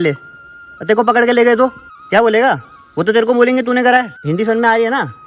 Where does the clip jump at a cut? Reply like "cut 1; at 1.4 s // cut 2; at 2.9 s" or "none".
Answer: cut 1; at 1.9 s // cut 2; at 4.1 s